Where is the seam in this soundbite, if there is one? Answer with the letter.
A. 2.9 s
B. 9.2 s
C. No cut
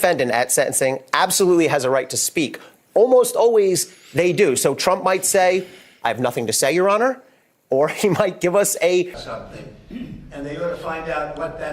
B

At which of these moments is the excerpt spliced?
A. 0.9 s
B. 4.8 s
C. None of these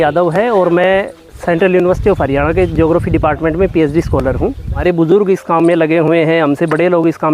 B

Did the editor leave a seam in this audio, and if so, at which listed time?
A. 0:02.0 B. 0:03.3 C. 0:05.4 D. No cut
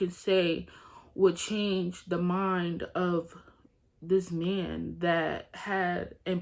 D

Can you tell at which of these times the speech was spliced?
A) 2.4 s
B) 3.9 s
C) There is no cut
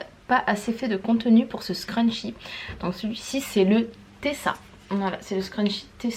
C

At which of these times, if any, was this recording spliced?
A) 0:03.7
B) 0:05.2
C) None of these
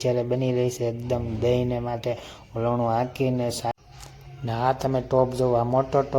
A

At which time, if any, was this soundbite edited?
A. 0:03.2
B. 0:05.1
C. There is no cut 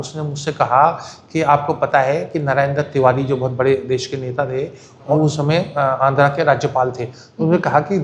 B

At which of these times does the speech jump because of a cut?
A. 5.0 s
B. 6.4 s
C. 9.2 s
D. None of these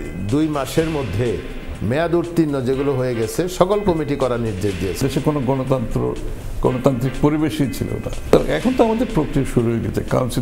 A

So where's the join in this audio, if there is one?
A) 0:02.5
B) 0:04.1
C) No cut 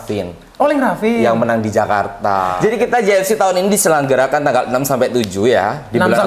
A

